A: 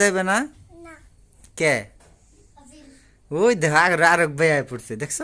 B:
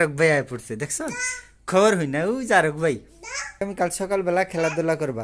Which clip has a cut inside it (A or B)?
B